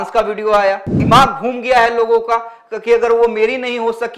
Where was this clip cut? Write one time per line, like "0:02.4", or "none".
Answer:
0:00.9